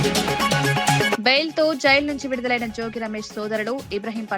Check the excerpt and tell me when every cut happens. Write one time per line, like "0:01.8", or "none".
0:01.1